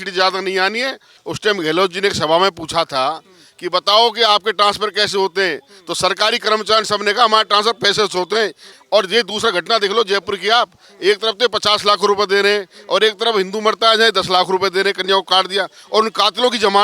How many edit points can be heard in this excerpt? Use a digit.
2